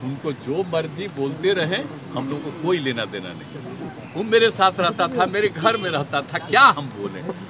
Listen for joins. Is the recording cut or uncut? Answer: cut